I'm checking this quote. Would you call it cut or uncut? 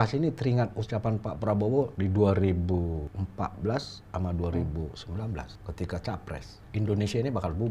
cut